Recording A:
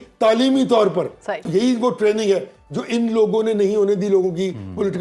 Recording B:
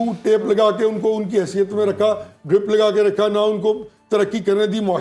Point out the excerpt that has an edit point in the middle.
A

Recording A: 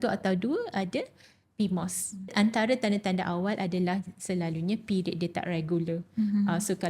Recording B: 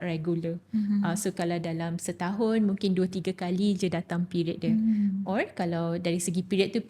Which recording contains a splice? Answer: A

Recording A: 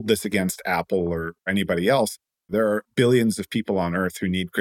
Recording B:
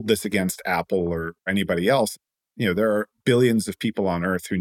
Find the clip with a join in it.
A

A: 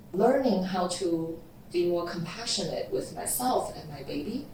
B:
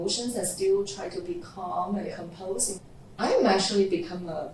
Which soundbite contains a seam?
B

